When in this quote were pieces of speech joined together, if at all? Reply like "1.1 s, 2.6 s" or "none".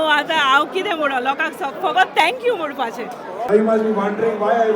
3.4 s